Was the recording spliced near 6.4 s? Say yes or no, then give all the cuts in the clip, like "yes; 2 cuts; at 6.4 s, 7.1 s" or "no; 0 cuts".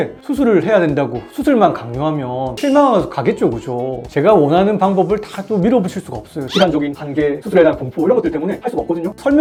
no; 0 cuts